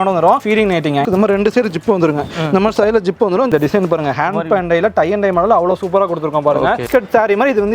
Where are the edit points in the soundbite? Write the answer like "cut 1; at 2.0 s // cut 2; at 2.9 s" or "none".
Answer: cut 1; at 1.0 s // cut 2; at 3.5 s // cut 3; at 6.9 s